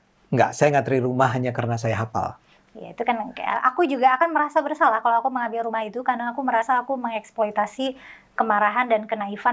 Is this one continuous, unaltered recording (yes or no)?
no